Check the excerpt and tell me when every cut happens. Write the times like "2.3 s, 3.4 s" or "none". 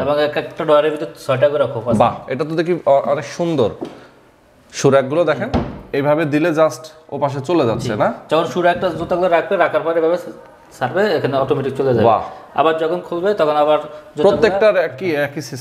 none

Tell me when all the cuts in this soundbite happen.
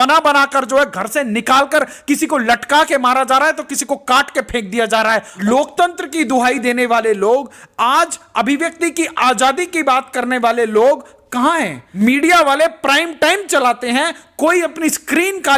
5.3 s, 11.8 s

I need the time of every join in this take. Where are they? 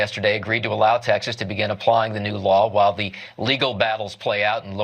3.5 s

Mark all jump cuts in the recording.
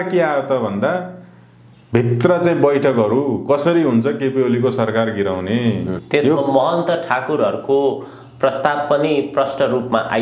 6.0 s

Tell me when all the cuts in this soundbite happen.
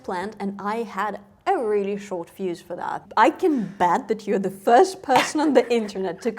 3.0 s

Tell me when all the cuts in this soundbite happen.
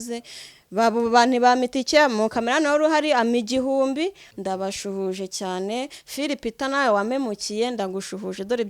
4.2 s

